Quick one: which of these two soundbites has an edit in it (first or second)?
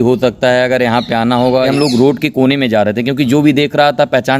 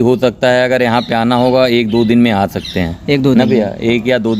first